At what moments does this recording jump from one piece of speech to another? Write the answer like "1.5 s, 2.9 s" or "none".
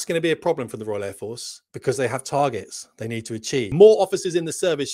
3.7 s